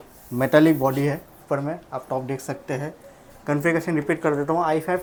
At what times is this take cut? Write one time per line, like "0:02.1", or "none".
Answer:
none